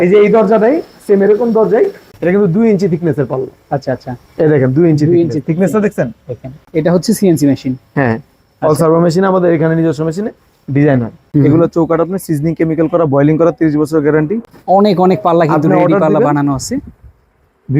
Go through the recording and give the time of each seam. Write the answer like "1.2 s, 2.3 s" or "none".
2.1 s, 6.6 s, 11.2 s, 14.5 s